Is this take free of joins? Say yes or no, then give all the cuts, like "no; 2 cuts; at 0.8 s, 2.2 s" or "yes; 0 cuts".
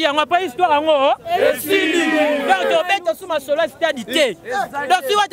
yes; 0 cuts